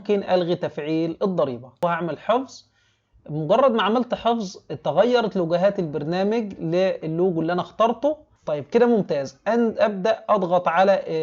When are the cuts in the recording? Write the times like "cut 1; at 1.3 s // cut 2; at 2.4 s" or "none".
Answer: cut 1; at 1.8 s // cut 2; at 8.3 s